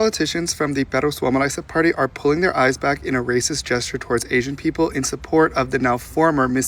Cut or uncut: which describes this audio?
uncut